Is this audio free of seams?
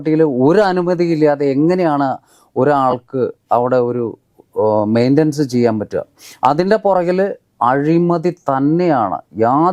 yes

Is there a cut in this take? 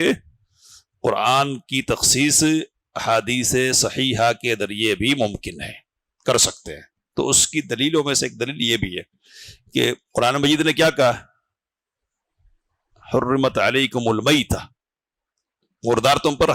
no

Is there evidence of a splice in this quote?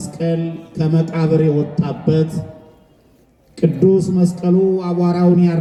no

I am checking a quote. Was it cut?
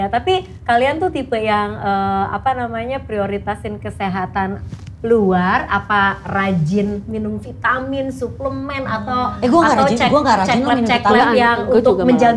no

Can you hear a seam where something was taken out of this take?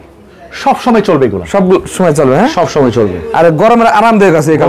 no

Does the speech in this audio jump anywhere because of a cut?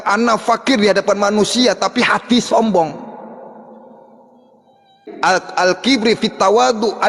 yes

